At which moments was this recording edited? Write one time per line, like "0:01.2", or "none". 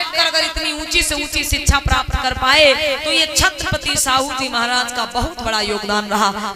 none